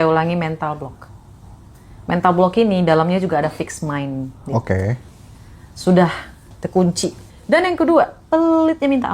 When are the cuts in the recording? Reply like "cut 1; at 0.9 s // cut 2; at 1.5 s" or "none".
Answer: cut 1; at 7.3 s